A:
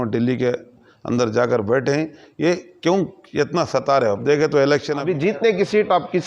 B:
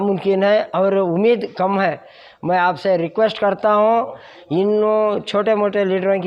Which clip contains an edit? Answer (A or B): A